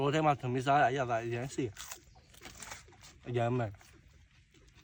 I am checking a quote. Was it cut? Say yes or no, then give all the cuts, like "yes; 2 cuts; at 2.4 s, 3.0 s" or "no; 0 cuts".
no; 0 cuts